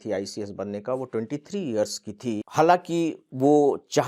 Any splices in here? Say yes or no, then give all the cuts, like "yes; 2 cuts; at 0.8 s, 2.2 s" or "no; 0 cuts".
yes; 1 cut; at 2.4 s